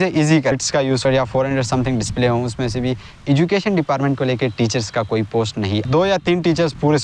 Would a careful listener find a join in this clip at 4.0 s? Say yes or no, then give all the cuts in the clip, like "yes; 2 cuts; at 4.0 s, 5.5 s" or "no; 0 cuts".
no; 2 cuts; at 1.1 s, 5.6 s